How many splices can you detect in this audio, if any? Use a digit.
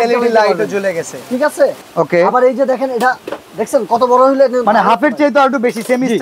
1